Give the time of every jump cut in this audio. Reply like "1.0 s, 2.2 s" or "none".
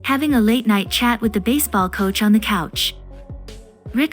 3.2 s